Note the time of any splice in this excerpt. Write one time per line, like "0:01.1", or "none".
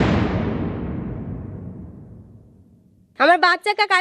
0:03.1